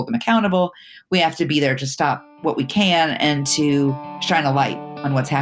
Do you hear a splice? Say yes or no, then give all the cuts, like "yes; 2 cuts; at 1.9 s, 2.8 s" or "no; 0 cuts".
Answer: yes; 2 cuts; at 2.3 s, 4.1 s